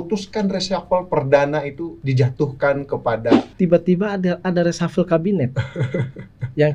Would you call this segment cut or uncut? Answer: cut